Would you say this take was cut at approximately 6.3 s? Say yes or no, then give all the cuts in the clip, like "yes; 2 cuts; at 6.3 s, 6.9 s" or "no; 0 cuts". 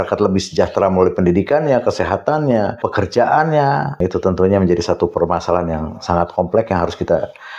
no; 2 cuts; at 2.9 s, 4.0 s